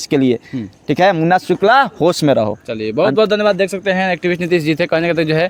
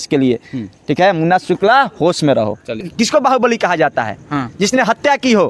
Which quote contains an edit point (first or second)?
second